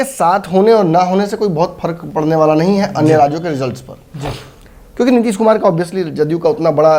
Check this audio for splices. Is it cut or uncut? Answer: uncut